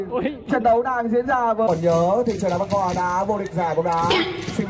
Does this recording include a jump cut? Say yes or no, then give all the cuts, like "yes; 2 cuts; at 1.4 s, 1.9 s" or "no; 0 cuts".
yes; 1 cut; at 1.7 s